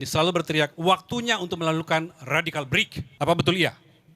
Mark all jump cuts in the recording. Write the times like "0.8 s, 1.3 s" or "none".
3.0 s